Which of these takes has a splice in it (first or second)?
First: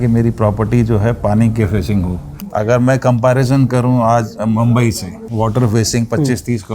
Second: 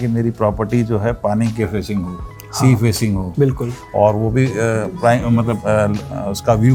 first